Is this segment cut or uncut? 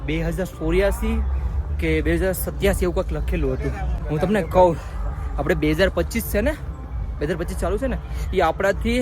cut